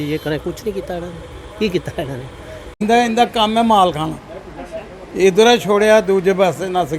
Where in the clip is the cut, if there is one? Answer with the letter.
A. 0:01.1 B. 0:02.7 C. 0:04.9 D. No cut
B